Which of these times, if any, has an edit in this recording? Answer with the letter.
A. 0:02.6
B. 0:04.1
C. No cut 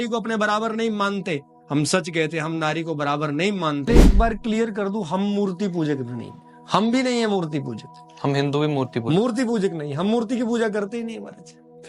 B